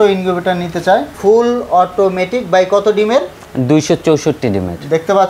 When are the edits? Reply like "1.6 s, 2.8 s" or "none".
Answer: 1.1 s

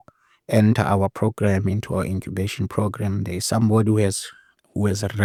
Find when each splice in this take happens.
none

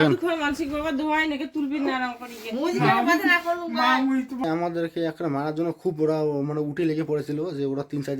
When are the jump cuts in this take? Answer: 4.4 s

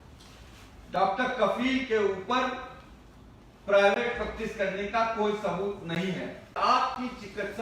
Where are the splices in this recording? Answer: 6.6 s

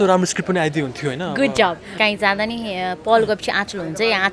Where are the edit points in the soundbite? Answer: 1.9 s

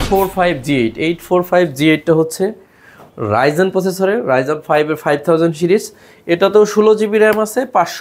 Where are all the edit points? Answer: none

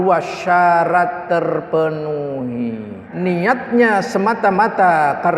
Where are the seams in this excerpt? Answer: 3.0 s

